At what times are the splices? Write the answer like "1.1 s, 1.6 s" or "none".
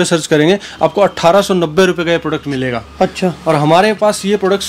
none